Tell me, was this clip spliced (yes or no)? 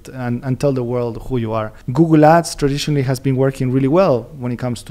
no